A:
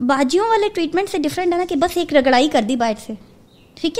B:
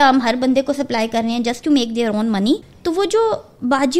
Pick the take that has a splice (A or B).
B